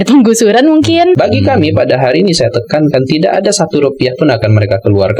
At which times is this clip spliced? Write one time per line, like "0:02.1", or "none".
0:01.2